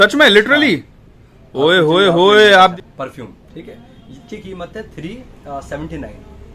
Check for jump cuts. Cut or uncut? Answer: cut